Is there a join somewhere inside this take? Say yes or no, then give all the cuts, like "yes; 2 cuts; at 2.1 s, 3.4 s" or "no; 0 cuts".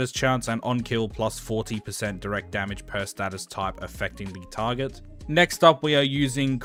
no; 0 cuts